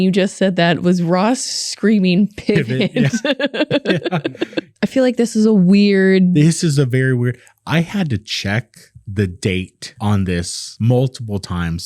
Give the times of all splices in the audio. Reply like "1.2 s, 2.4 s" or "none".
4.7 s